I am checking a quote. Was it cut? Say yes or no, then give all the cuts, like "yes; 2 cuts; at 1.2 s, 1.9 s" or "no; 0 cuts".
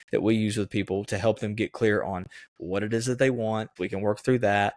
yes; 1 cut; at 3.8 s